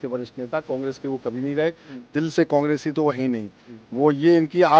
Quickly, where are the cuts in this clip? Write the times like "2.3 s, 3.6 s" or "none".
none